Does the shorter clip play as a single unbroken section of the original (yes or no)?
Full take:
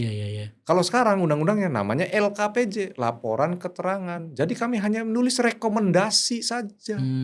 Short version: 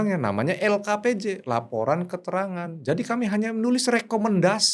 yes